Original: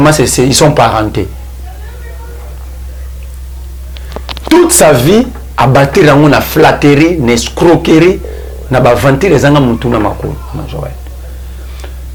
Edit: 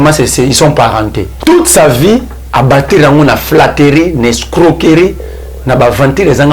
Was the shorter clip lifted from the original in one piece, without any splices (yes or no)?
no